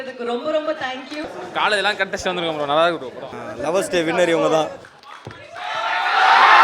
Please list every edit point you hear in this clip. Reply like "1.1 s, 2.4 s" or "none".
1.3 s, 3.3 s, 5.0 s